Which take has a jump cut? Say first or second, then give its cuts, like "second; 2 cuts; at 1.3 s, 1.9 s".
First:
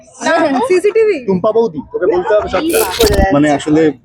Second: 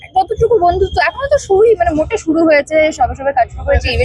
first; 1 cut; at 2.9 s